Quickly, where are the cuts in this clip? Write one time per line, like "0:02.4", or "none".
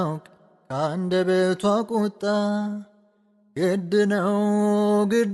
none